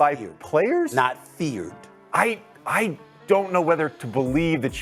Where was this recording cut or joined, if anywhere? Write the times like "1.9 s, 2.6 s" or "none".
none